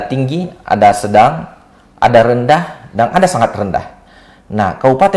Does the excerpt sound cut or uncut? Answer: uncut